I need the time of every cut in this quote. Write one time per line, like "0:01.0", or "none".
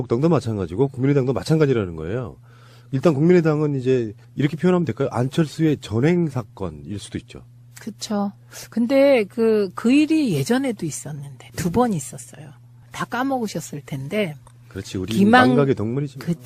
none